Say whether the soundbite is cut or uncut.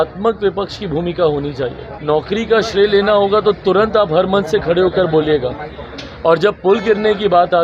cut